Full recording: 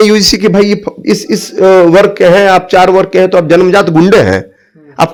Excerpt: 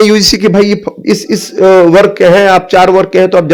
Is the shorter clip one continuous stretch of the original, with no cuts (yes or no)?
yes